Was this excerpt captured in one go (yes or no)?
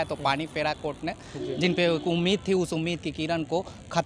yes